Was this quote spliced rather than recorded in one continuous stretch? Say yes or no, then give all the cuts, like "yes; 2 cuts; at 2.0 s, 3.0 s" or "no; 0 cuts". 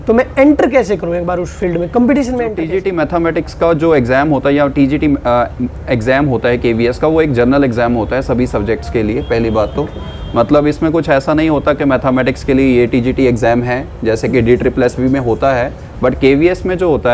yes; 1 cut; at 2.6 s